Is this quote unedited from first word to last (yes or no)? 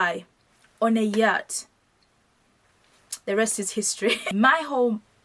no